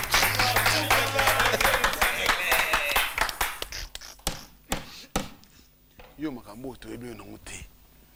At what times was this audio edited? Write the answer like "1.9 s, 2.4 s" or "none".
none